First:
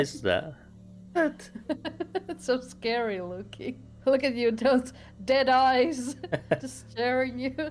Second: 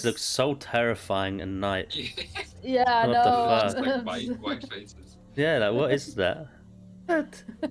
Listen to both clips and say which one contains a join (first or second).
first